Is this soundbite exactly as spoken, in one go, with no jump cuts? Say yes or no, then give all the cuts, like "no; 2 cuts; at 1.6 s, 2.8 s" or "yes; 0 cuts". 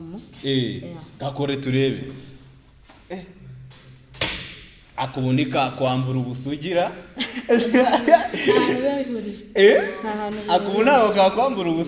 yes; 0 cuts